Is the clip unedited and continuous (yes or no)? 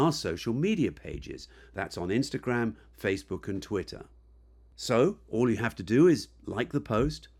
yes